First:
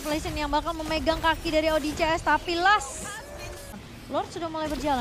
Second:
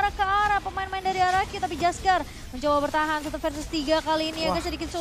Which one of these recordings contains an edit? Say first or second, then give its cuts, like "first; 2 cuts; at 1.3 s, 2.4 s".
first; 1 cut; at 3.7 s